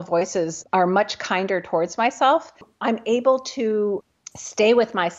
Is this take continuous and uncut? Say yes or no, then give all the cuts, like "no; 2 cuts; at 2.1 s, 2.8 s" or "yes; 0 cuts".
no; 1 cut; at 2.6 s